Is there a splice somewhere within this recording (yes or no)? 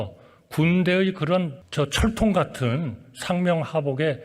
yes